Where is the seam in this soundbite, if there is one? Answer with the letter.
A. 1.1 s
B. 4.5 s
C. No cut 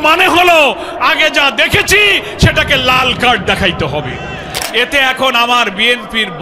B